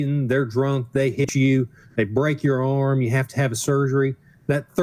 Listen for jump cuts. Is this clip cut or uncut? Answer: cut